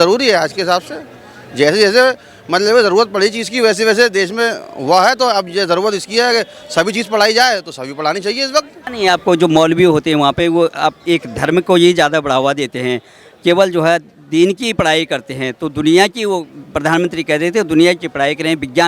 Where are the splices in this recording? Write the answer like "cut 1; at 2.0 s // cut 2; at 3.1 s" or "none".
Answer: none